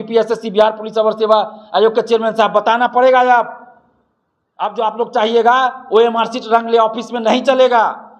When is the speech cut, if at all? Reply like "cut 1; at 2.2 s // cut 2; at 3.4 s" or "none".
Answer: none